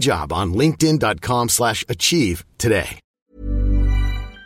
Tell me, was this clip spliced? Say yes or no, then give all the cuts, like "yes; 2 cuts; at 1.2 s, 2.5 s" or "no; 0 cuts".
yes; 1 cut; at 3.1 s